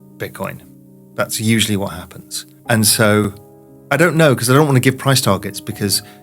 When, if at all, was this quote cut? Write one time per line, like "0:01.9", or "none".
0:02.5